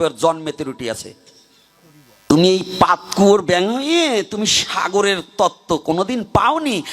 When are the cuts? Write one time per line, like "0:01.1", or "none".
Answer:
0:02.2